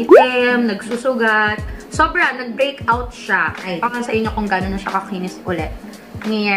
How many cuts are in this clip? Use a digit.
1